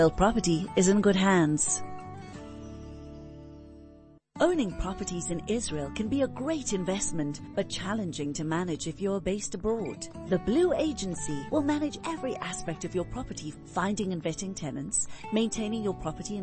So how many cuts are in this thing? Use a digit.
2